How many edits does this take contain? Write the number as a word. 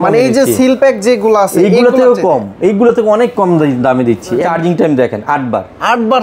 one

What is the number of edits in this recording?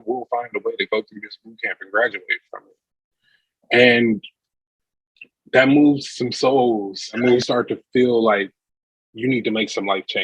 one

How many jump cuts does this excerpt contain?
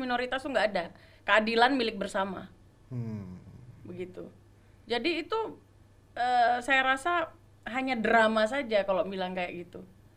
zero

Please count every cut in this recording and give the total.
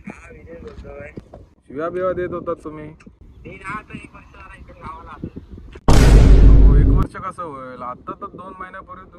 one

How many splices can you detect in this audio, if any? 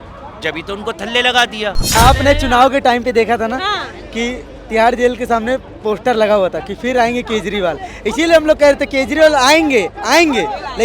one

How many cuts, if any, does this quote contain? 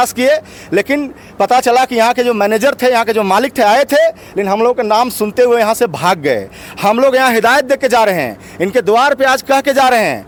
zero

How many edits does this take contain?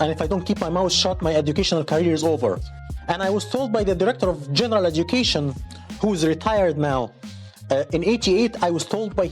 one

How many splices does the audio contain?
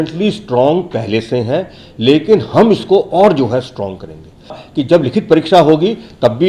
one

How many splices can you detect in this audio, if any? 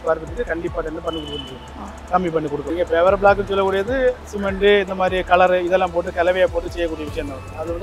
one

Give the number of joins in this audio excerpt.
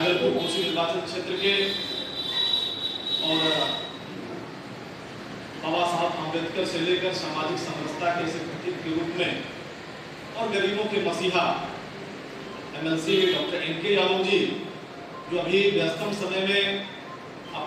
zero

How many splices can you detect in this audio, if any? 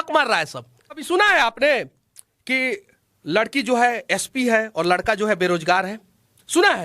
one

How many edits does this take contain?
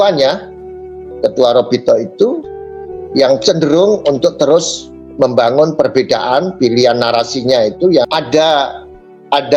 one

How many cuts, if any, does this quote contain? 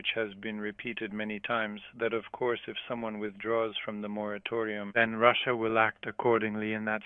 one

